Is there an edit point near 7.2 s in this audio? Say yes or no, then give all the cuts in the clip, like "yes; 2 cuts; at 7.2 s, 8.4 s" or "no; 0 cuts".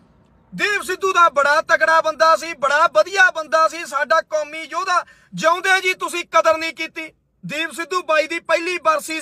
yes; 1 cut; at 7.2 s